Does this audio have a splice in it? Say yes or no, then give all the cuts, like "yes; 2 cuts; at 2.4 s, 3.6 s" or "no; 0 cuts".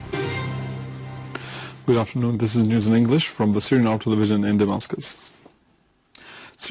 yes; 1 cut; at 3.8 s